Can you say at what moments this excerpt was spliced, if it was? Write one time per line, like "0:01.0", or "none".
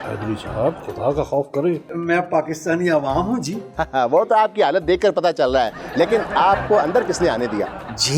0:01.9